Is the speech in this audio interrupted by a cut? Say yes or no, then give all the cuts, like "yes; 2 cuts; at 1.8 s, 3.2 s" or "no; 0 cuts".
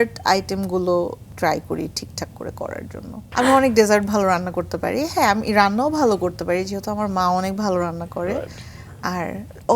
yes; 2 cuts; at 1.2 s, 3.2 s